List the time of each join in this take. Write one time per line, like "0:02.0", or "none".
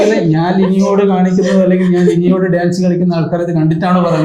none